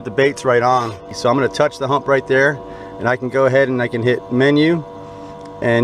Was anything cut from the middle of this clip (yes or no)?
yes